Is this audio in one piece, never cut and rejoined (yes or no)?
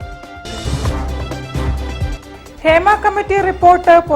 no